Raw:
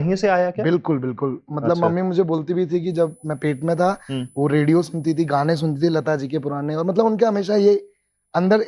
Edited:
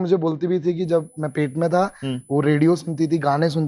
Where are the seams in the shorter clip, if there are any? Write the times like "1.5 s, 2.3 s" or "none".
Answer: none